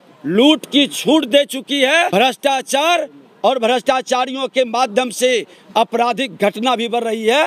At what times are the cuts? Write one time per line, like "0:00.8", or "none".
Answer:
none